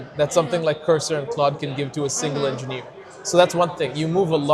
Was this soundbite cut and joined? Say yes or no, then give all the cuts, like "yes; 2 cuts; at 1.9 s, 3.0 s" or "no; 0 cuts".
no; 0 cuts